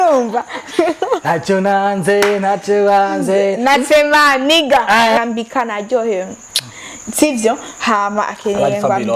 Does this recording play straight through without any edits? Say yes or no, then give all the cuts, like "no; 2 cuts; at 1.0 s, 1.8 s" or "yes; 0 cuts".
no; 1 cut; at 5.2 s